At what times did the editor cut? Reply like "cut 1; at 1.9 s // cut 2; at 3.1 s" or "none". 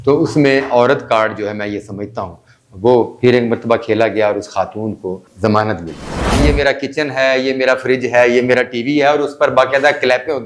cut 1; at 5.2 s // cut 2; at 6.4 s